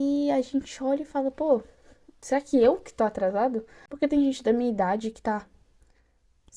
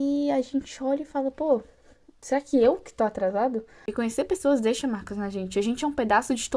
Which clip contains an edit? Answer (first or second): second